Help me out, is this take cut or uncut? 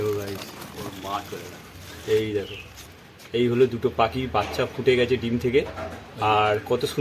uncut